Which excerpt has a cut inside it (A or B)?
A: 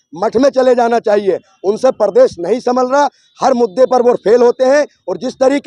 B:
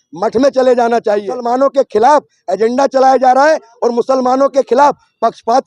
B